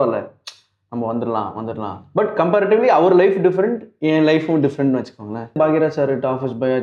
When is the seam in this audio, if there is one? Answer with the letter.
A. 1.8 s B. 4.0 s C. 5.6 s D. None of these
C